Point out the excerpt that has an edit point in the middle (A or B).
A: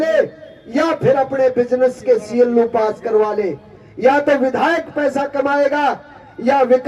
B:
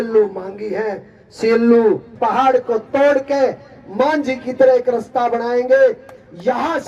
B